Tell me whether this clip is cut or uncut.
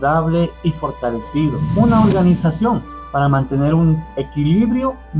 cut